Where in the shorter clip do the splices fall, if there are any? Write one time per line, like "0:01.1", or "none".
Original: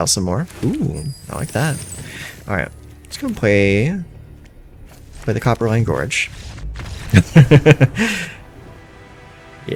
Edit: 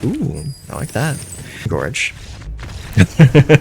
0:01.7